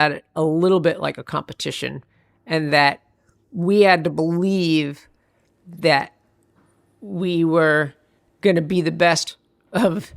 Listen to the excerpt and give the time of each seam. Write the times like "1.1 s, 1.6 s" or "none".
9.2 s